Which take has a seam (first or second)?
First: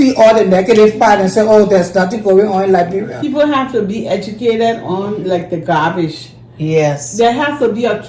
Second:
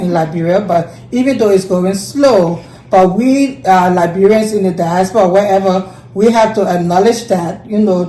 first